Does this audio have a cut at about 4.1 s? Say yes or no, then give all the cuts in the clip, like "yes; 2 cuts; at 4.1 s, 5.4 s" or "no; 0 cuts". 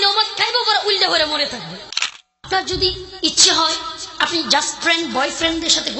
no; 1 cut; at 2.3 s